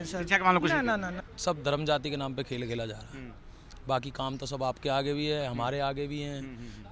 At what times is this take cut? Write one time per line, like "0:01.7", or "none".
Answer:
0:01.2